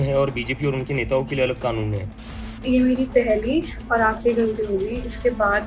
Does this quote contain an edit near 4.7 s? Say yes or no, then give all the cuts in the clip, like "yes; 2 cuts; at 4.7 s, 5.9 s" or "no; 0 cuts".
no; 1 cut; at 2.5 s